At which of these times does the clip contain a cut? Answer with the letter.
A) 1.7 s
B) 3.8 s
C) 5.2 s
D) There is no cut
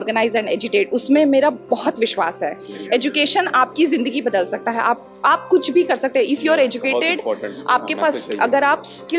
D